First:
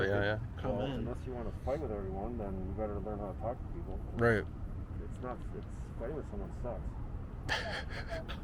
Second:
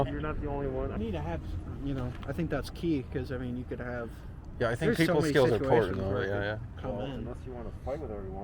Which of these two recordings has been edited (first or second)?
second